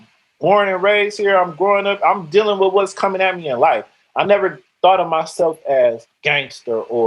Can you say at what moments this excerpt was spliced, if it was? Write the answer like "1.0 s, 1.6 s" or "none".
6.1 s